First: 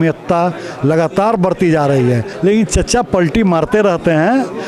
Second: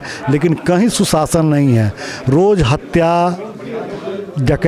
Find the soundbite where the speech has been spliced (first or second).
first